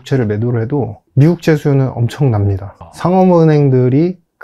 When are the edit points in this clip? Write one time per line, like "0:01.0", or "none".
0:01.0
0:02.9

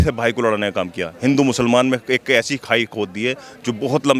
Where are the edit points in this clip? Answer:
none

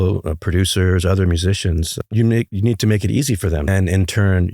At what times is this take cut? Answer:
0:02.0
0:03.7

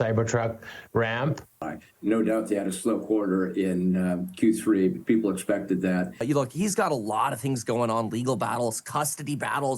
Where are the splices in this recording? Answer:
0:01.6
0:06.2

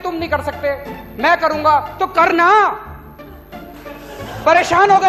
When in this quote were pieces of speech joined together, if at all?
none

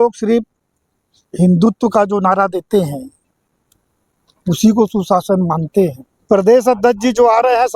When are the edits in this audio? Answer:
0:06.1

